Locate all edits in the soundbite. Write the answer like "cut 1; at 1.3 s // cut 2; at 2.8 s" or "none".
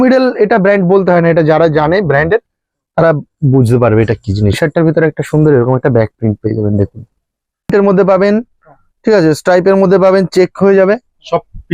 cut 1; at 4.6 s // cut 2; at 7.7 s